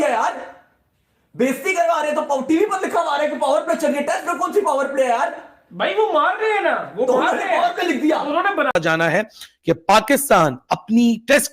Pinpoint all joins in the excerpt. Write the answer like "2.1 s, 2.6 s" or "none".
8.7 s